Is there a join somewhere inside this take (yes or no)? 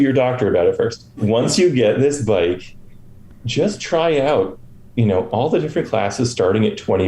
yes